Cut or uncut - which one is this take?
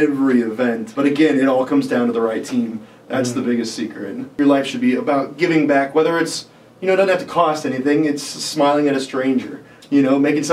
cut